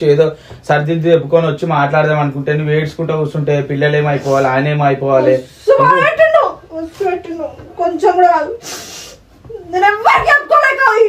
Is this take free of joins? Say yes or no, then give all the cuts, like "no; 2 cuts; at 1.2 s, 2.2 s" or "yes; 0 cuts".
yes; 0 cuts